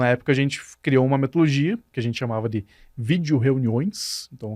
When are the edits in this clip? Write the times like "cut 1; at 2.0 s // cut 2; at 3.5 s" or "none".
cut 1; at 1.9 s